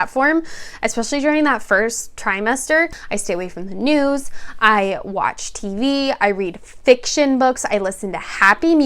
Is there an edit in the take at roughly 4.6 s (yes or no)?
no